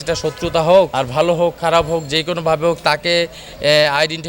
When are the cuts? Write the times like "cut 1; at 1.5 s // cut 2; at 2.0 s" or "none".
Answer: cut 1; at 1.0 s